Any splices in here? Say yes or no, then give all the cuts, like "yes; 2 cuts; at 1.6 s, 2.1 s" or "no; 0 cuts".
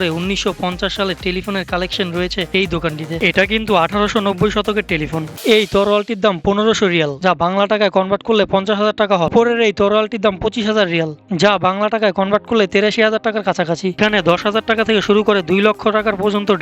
yes; 4 cuts; at 3.1 s, 5.3 s, 9.3 s, 14.0 s